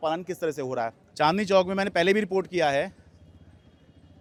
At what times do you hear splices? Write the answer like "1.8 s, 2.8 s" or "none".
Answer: none